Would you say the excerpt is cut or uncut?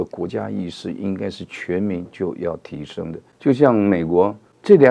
cut